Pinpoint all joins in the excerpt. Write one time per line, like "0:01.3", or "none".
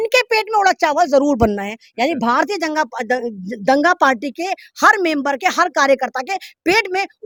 none